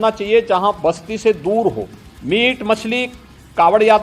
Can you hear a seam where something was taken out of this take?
no; 0 cuts

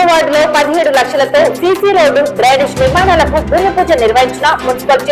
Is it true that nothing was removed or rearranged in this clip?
yes; 0 cuts

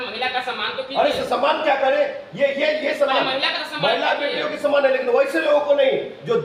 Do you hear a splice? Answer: no; 0 cuts

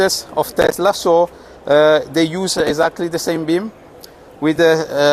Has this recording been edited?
no; 0 cuts

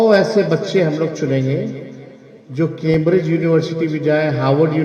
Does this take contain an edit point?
no; 0 cuts

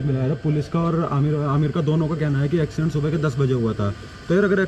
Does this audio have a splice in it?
no; 0 cuts

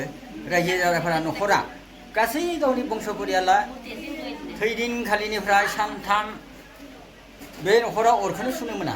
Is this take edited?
no; 0 cuts

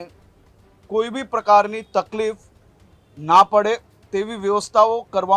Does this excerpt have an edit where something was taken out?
no; 0 cuts

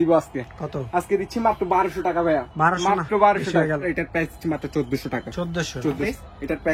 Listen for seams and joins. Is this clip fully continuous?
yes; 0 cuts

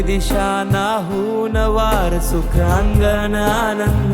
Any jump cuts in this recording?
no; 0 cuts

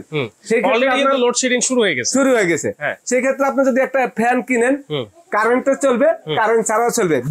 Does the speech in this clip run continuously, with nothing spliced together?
yes; 0 cuts

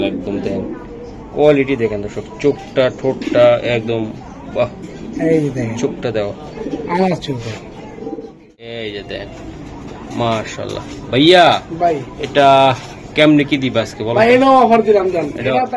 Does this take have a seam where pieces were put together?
yes; 1 cut; at 8.6 s

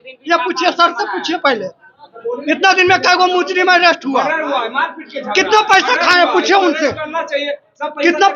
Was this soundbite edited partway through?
no; 0 cuts

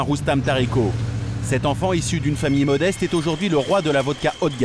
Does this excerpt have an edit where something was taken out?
no; 0 cuts

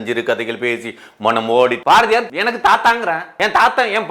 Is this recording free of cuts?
no; 2 cuts; at 2.0 s, 3.3 s

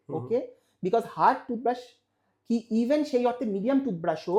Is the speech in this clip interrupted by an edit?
no; 0 cuts

